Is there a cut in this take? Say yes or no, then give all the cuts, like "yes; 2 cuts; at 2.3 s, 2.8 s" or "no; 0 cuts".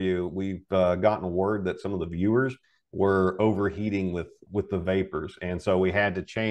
yes; 1 cut; at 4.3 s